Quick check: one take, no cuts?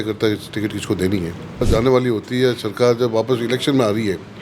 no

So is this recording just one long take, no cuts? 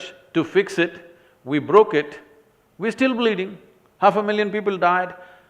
yes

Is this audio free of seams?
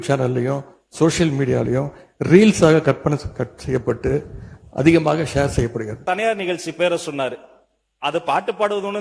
no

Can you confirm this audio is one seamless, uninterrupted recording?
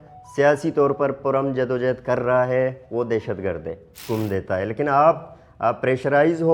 no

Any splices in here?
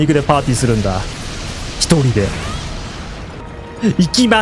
yes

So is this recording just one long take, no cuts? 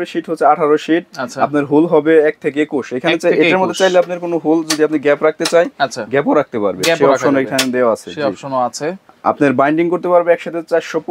yes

